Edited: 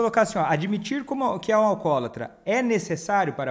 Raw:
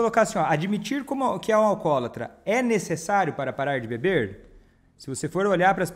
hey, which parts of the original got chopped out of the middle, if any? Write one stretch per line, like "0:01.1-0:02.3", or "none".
none